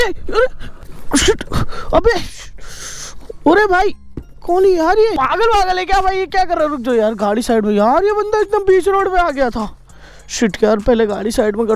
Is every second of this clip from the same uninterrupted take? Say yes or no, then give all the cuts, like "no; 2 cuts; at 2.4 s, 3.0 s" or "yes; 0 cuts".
yes; 0 cuts